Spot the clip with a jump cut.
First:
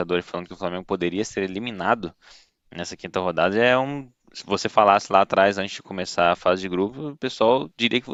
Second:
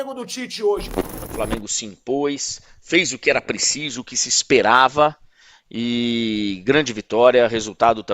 second; 1 cut; at 1.1 s

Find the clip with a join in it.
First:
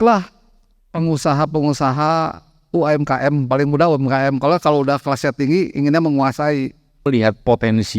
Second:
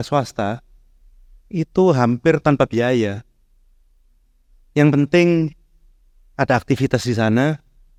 first; 1 cut; at 7.1 s

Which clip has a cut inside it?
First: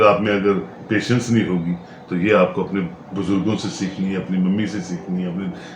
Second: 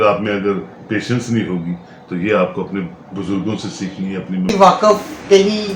second; 1 cut; at 4.5 s

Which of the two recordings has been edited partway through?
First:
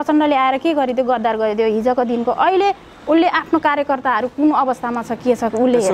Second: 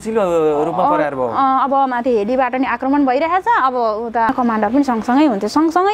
second; 1 cut; at 4.3 s

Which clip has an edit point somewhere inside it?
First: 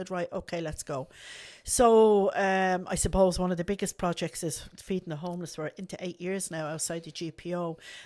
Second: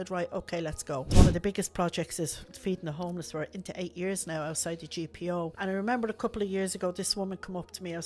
second; 2 cuts; at 1.1 s, 5.5 s

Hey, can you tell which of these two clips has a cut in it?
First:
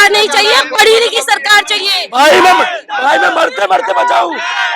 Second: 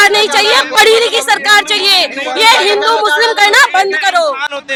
first; 1 cut; at 1.9 s

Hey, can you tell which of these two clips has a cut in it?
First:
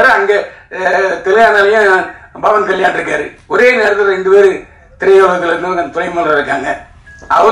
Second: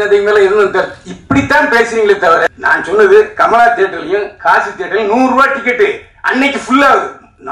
second; 1 cut; at 2.5 s

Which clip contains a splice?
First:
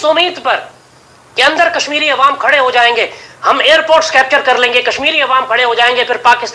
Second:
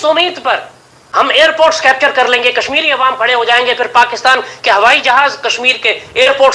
second; 1 cut; at 0.9 s

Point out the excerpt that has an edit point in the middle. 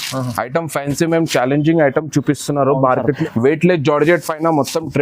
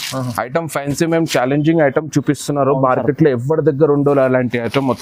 first; 1 cut; at 3.2 s

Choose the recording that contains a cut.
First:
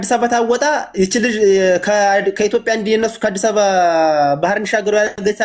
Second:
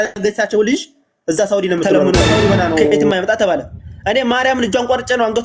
second; 1 cut; at 3.1 s

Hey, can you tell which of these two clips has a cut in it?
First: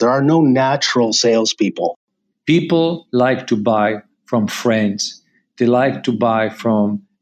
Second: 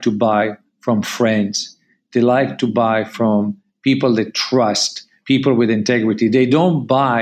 first; 1 cut; at 2.1 s

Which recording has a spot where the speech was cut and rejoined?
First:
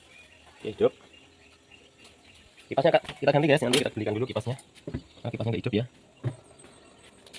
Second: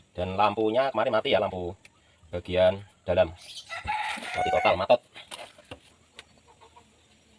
second; 1 cut; at 5.9 s

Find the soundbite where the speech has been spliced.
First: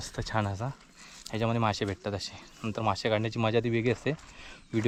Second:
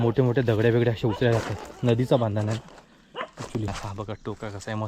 second; 1 cut; at 3.7 s

